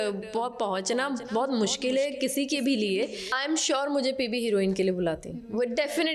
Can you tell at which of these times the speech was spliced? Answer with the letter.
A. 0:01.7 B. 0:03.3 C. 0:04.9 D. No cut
B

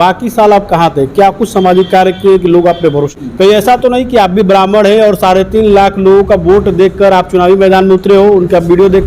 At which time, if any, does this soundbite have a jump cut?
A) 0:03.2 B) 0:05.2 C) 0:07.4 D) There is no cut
A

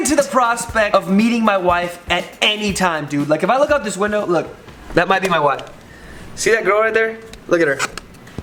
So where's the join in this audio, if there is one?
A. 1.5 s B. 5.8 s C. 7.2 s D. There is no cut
D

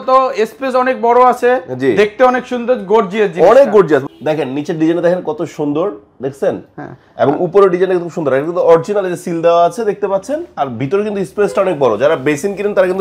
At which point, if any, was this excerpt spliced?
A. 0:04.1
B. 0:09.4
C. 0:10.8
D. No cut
A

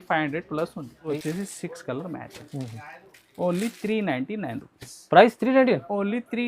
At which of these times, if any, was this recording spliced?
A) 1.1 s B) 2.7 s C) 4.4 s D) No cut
A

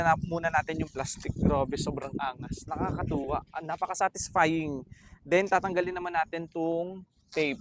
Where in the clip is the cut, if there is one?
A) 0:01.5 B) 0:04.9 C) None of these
C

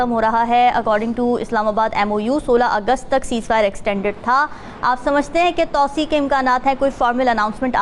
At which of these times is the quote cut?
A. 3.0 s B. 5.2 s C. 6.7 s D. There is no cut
D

